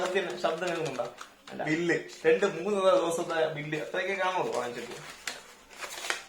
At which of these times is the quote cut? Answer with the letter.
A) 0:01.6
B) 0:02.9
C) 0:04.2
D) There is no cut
A